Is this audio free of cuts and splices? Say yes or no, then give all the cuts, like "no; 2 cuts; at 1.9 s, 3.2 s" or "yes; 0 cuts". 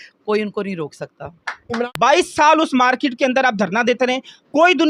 no; 1 cut; at 1.9 s